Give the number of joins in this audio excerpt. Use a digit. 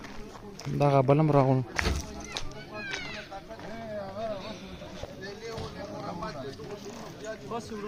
0